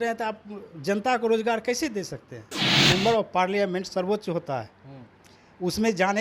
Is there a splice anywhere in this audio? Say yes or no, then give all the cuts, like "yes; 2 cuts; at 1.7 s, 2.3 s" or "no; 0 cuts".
yes; 1 cut; at 2.7 s